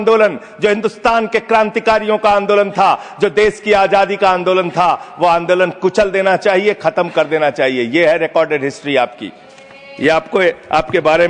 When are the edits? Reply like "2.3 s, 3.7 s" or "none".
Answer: none